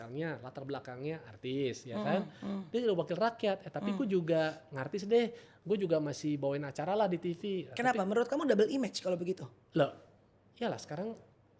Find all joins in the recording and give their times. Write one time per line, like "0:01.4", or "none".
none